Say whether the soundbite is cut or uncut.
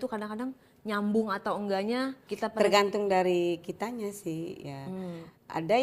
cut